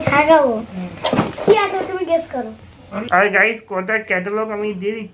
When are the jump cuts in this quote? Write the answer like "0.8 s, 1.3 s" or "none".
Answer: 2.9 s